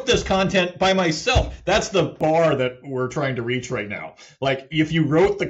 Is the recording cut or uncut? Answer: cut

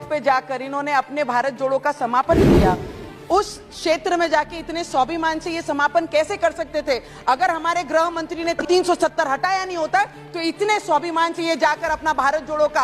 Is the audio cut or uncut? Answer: cut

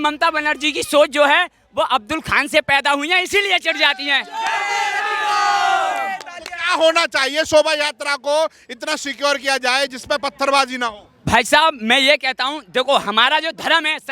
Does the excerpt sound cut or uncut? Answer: uncut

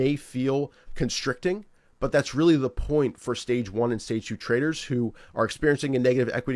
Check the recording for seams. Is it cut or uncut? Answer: uncut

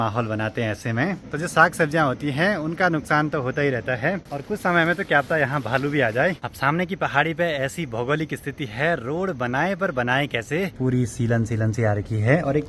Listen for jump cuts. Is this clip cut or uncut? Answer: cut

